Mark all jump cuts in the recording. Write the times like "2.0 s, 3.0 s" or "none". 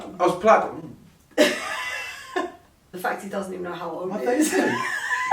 2.9 s